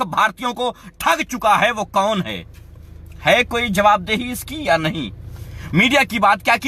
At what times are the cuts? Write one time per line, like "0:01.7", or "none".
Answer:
none